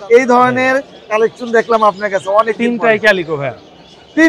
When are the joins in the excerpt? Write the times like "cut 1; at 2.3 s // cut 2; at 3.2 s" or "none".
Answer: none